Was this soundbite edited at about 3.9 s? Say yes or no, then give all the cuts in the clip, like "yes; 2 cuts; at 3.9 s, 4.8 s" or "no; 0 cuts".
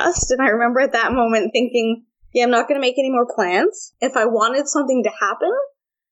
yes; 1 cut; at 3.9 s